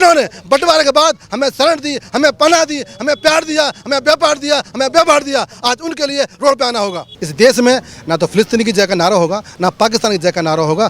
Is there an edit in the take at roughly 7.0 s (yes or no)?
yes